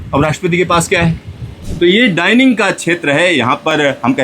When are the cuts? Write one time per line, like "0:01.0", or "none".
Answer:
0:01.6